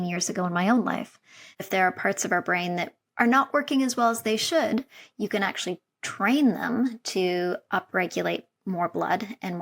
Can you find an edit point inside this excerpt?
yes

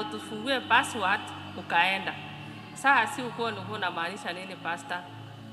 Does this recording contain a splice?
no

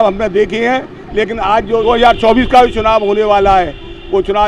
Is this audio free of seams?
no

